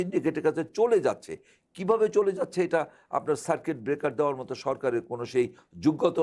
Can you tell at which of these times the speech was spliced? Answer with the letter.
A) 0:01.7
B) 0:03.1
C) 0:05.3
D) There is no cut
D